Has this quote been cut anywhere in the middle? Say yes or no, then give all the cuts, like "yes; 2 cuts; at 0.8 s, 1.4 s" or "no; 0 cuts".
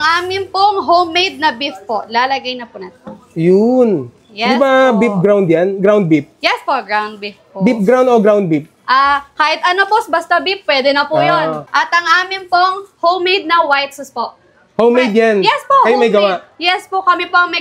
no; 0 cuts